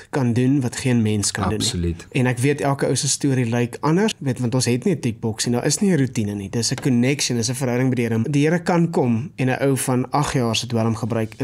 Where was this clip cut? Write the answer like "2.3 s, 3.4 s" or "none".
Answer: 2.0 s, 4.2 s, 8.2 s